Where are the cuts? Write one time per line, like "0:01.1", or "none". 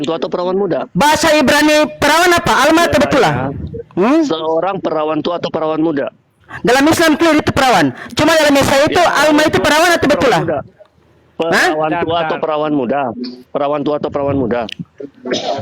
none